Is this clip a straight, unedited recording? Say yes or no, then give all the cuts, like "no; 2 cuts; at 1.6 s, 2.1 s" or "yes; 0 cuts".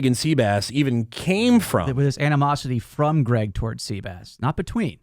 no; 1 cut; at 1.9 s